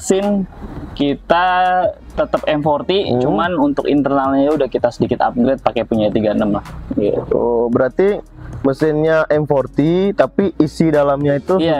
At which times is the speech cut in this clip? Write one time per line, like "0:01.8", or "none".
none

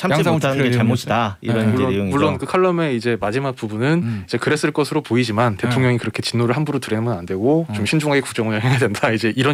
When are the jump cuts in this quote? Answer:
none

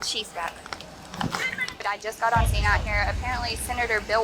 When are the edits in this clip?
0:01.9

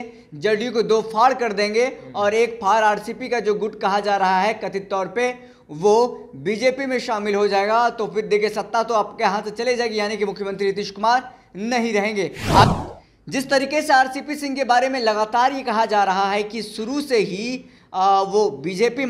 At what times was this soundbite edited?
0:12.6

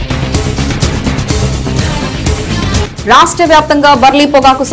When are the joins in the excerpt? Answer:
0:01.9

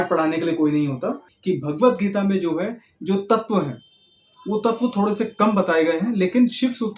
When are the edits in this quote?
0:01.3

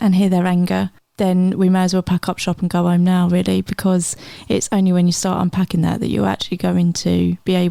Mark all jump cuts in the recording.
none

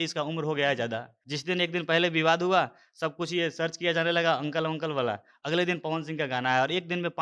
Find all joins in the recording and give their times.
0:01.2

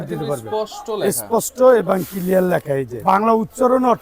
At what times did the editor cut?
0:03.0

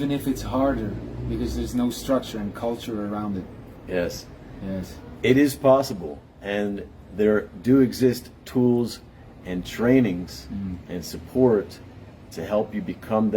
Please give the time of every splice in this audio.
none

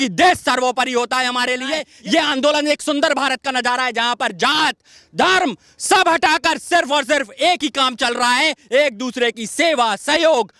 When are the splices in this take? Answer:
0:01.9

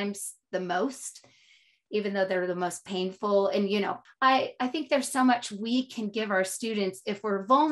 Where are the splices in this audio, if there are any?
0:04.0

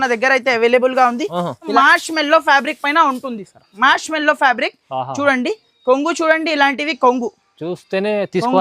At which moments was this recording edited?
0:01.7

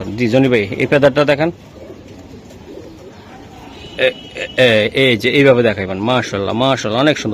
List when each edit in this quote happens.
none

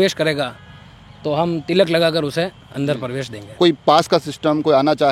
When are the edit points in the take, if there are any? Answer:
0:03.5

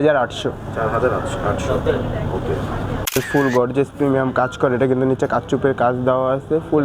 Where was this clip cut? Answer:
0:03.2

